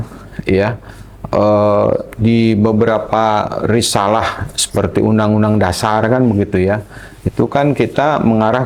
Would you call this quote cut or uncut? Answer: uncut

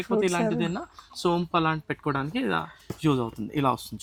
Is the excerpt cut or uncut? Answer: uncut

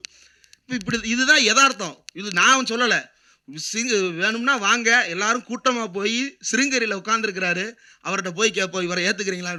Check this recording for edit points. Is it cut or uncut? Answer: uncut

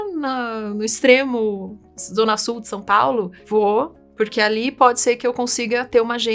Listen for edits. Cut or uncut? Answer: cut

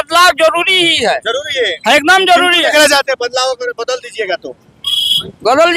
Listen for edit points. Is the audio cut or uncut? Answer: uncut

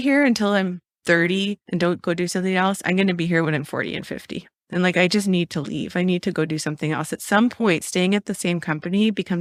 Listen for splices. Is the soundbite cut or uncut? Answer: uncut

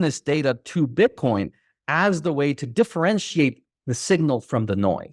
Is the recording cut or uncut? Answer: uncut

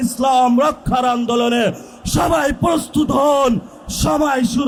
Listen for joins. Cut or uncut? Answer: uncut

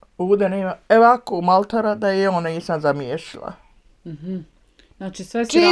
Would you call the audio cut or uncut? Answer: uncut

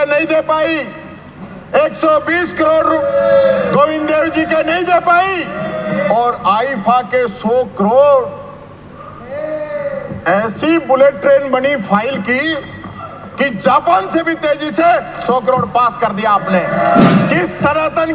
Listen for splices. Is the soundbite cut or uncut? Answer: cut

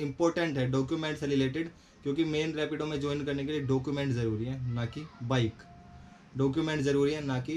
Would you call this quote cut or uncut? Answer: uncut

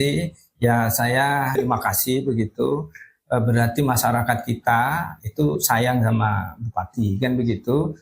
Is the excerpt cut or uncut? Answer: cut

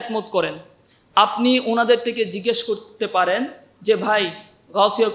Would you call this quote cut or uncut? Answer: uncut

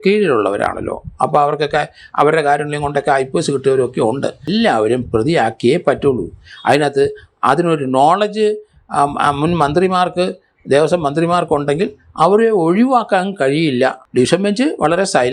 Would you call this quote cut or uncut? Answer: cut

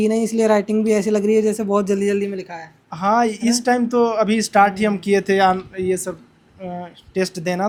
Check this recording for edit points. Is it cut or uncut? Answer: uncut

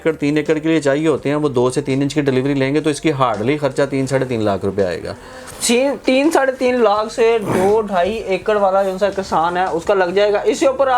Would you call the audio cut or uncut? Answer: uncut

